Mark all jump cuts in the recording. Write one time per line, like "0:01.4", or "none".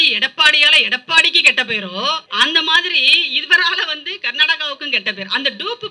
0:02.3